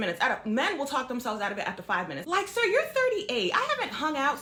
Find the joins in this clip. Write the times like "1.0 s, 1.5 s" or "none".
none